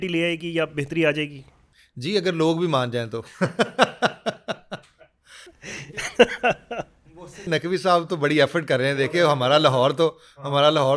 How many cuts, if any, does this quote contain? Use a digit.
0